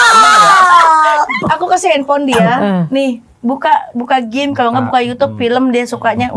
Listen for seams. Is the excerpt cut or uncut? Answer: cut